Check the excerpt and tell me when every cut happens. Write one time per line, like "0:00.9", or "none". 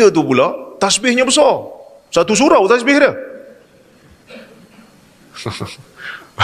none